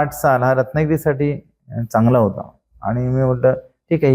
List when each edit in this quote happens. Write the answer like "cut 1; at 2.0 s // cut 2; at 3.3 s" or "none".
none